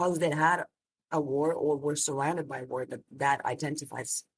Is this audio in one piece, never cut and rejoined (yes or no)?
yes